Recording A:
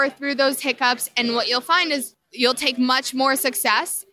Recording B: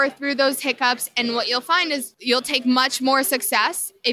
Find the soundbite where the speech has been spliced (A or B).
B